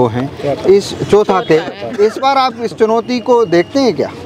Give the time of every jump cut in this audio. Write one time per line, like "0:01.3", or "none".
none